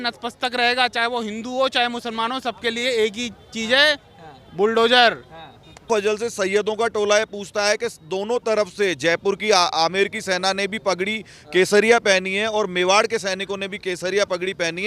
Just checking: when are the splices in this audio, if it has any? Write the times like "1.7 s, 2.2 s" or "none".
5.9 s